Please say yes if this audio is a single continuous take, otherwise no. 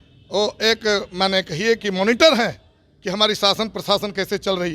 yes